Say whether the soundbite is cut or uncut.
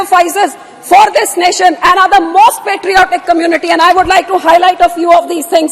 uncut